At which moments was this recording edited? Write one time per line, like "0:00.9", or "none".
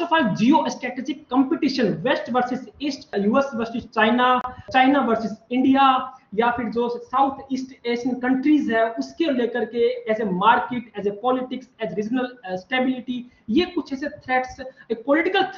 0:03.1
0:04.7